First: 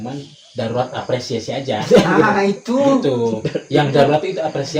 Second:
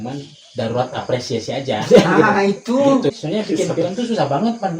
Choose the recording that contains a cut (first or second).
second